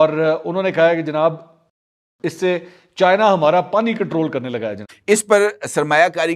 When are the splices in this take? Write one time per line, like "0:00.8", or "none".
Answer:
0:04.9